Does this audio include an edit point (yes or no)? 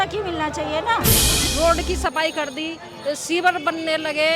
yes